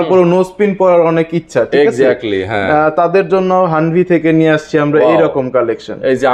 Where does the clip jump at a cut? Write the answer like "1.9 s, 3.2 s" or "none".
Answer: none